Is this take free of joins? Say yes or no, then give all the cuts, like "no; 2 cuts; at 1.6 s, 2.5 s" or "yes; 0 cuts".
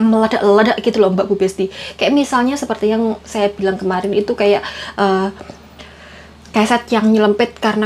yes; 0 cuts